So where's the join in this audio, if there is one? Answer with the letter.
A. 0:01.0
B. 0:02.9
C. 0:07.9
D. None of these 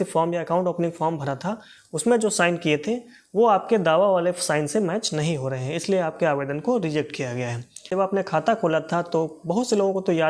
C